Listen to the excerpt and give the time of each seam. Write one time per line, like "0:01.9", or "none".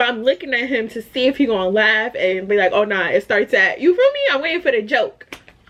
none